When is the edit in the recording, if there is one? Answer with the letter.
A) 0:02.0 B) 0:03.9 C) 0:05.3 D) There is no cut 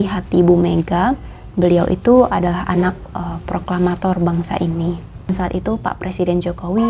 C